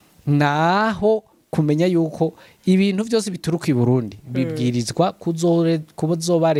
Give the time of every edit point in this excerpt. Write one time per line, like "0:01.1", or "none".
none